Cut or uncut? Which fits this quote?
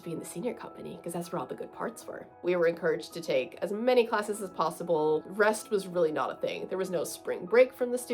cut